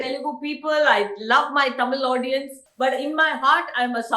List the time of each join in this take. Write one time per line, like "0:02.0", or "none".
0:02.6

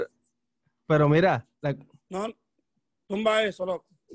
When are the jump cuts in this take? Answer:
0:01.5

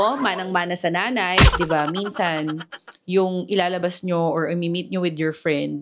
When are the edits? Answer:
0:01.6

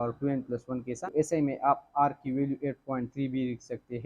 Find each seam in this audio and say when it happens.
0:00.9

